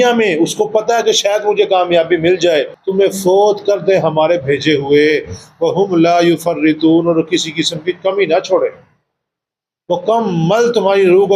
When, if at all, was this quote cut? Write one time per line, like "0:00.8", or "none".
0:02.8